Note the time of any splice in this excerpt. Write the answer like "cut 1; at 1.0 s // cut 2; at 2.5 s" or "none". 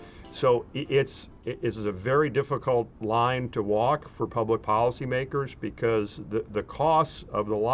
cut 1; at 1.3 s // cut 2; at 3.0 s